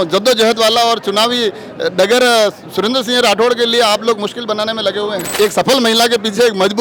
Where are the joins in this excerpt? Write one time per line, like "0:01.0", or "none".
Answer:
0:05.3